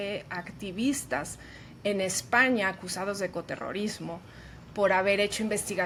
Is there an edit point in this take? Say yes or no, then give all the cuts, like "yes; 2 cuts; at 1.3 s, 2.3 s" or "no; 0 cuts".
no; 0 cuts